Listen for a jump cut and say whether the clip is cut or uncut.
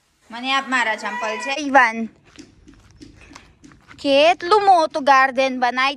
cut